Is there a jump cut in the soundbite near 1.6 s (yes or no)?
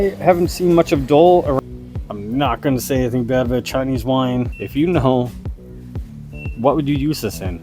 yes